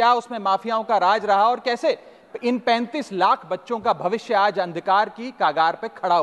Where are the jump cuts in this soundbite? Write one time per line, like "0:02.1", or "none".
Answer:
none

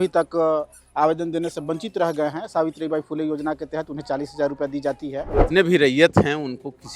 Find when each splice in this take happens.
0:05.4

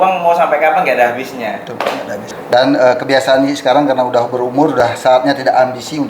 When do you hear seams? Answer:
0:02.3

